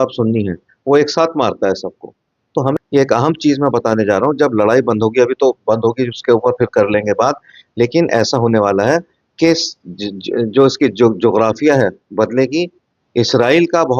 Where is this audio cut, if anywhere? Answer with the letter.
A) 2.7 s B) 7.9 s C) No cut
A